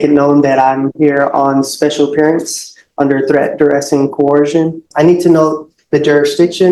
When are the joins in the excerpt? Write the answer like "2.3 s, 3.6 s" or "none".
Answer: 4.9 s